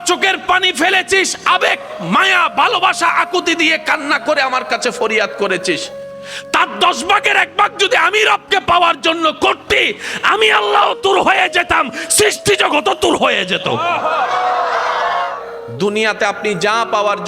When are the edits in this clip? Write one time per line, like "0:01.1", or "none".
0:15.4